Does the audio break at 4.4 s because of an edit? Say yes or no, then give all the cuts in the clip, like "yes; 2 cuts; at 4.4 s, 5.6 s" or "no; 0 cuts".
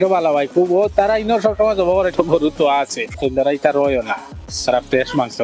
no; 2 cuts; at 2.1 s, 3.2 s